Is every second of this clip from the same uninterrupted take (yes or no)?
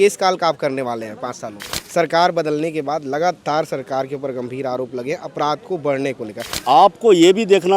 no